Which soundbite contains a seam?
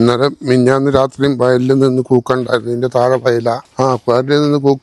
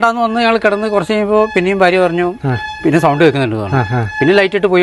first; 1 cut; at 3.6 s

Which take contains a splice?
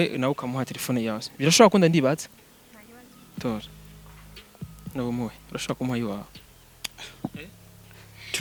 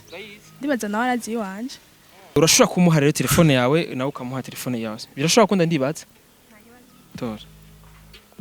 second; 1 cut; at 2.4 s

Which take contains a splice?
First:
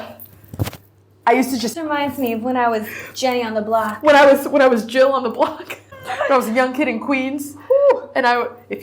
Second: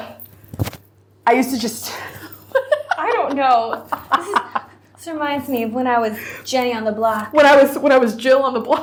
first; 2 cuts; at 1.8 s, 5.9 s

